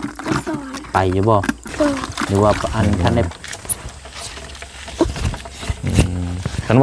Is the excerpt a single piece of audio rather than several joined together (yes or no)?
no